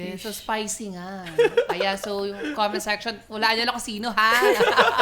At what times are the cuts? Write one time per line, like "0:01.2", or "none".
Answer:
none